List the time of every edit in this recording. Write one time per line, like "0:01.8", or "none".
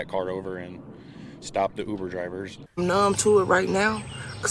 0:02.6